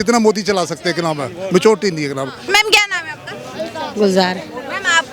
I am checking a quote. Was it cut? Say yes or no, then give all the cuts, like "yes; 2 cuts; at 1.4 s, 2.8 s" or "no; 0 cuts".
yes; 1 cut; at 2.4 s